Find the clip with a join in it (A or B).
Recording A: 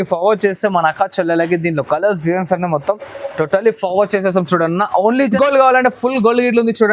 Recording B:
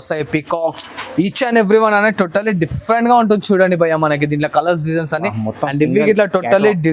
A